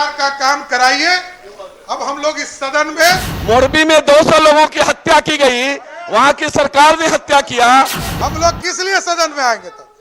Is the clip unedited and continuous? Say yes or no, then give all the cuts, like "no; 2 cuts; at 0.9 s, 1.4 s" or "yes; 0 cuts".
no; 2 cuts; at 3.3 s, 8.0 s